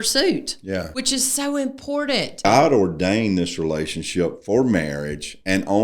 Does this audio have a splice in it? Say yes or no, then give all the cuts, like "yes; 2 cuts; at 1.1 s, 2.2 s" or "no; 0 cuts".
yes; 2 cuts; at 0.9 s, 2.4 s